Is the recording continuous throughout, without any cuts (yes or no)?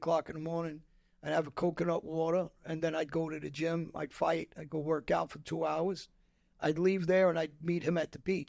yes